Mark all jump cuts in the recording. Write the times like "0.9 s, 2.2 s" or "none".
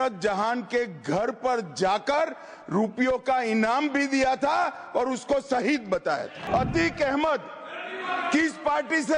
6.4 s